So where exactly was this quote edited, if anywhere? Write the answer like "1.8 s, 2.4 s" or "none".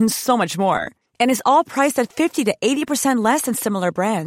none